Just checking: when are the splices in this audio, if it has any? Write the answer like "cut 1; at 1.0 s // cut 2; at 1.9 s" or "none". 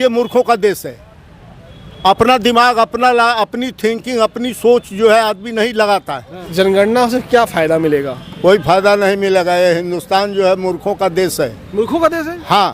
cut 1; at 6.4 s